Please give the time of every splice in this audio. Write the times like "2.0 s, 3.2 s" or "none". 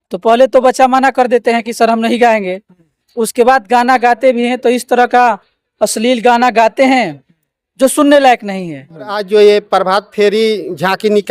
9.2 s